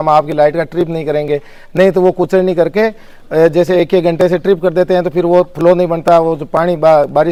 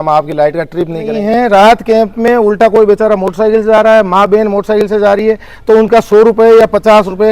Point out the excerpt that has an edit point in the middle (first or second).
second